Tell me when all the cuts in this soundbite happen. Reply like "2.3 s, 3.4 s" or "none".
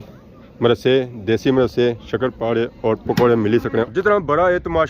3.9 s